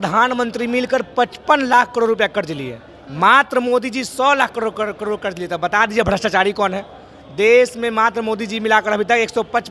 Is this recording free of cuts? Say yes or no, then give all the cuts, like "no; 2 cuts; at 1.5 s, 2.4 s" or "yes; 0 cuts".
yes; 0 cuts